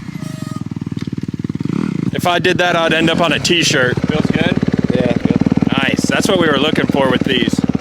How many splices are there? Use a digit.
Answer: 3